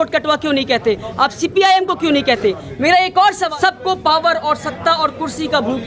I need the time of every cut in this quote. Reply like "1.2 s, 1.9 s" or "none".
3.5 s